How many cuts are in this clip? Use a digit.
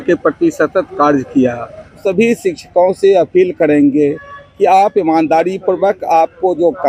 1